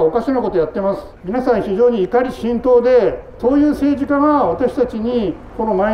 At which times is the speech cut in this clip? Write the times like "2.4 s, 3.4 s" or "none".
1.1 s, 3.3 s